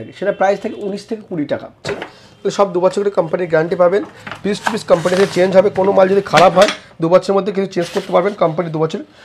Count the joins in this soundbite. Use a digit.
1